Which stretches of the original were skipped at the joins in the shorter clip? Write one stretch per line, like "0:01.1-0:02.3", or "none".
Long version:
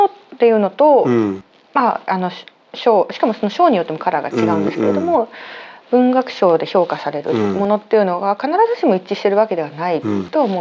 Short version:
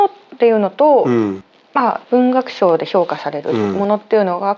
0:02.0-0:05.8